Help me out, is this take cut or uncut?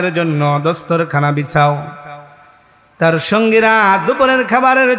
uncut